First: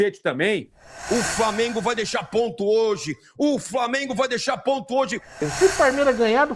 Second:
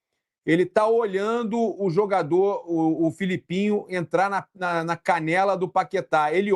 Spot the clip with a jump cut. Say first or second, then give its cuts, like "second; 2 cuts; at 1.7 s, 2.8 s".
first; 2 cuts; at 0.9 s, 5.4 s